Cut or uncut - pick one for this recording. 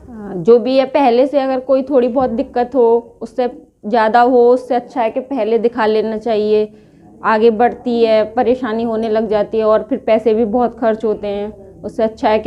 uncut